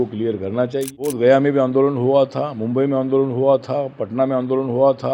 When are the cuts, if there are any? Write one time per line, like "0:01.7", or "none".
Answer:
0:01.1